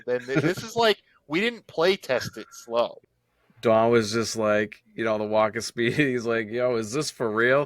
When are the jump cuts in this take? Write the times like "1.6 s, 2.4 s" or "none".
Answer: 3.0 s

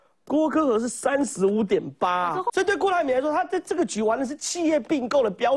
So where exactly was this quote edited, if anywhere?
2.5 s

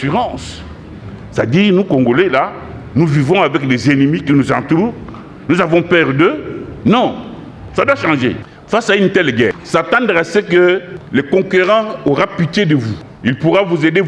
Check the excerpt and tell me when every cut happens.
8.5 s, 9.6 s, 10.9 s, 13.0 s

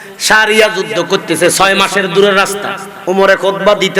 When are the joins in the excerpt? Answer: 2.9 s

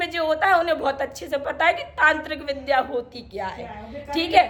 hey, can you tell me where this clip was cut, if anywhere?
none

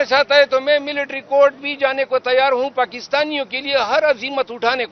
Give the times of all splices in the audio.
none

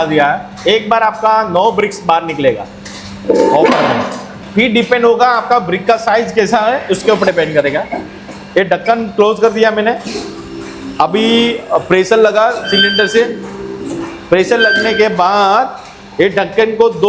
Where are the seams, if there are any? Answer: 4.3 s

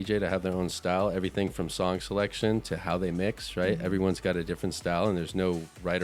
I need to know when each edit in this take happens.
none

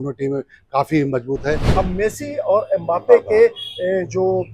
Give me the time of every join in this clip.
1.6 s

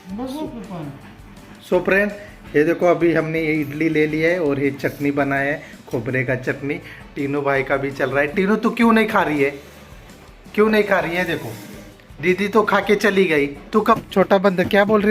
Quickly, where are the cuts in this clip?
14.0 s

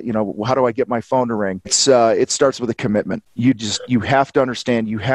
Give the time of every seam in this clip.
none

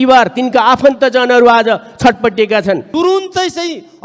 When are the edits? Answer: 2.9 s

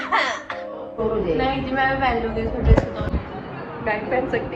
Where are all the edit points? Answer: 1.0 s

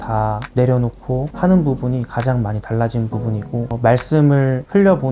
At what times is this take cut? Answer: 1.3 s, 3.7 s

